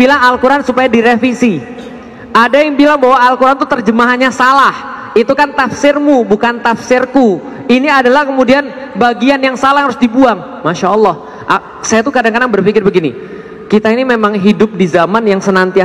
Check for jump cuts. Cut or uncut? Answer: uncut